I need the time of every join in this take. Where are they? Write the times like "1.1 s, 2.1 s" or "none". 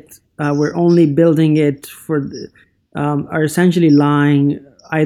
none